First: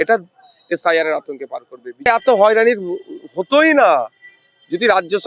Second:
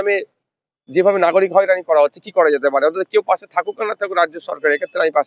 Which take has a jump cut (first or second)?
first